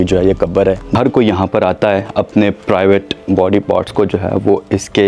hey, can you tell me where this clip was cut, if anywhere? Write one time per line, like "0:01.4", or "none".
0:00.9